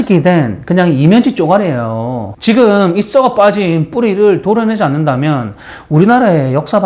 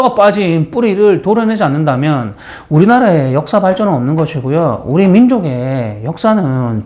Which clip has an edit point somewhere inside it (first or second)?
first